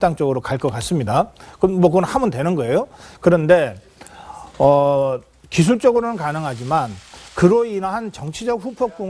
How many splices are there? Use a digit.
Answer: 0